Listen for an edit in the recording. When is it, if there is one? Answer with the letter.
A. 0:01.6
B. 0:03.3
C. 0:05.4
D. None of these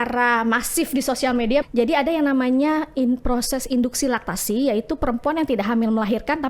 A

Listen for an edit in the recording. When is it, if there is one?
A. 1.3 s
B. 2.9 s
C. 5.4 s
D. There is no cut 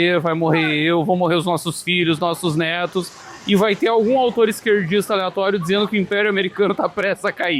D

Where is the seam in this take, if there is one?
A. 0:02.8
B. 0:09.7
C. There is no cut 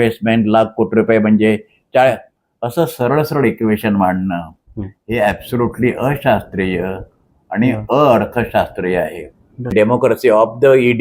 B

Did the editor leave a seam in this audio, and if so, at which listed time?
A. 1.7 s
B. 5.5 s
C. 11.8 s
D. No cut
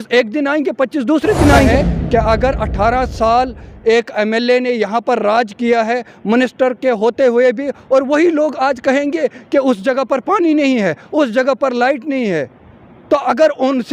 A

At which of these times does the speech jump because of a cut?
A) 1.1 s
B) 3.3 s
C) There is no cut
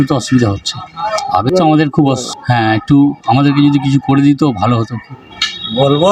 A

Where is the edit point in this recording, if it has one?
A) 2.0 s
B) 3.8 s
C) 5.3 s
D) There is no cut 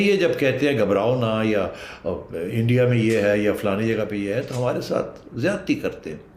D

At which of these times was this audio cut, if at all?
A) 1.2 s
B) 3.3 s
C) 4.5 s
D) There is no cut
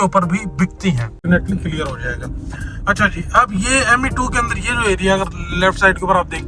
A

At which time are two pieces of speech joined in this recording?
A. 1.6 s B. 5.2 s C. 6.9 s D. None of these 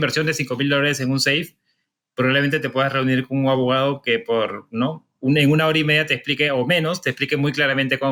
D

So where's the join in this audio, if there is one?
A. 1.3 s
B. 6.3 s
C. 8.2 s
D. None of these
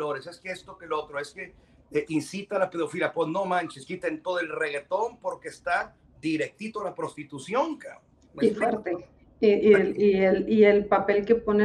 D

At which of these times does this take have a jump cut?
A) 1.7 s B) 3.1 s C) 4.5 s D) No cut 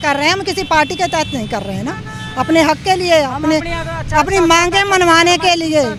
D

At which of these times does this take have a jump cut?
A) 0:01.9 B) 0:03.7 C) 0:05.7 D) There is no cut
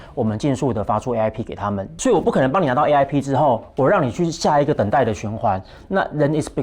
A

